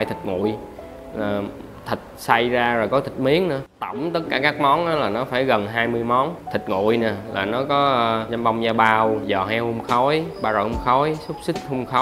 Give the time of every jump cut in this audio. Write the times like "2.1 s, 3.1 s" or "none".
3.7 s, 6.4 s, 8.3 s, 9.2 s, 10.3 s